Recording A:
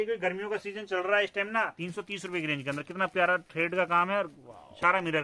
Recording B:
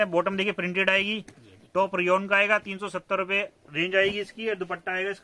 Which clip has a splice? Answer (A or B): A